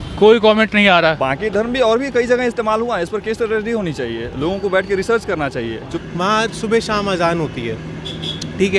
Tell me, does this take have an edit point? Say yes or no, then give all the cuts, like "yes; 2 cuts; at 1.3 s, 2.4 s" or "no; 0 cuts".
yes; 2 cuts; at 1.2 s, 5.9 s